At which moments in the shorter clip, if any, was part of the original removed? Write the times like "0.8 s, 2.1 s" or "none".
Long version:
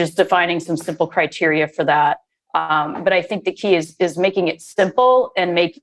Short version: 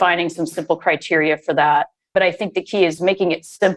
2.0 s, 3.0 s